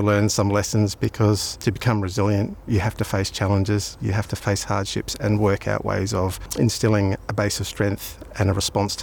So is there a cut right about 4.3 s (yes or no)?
yes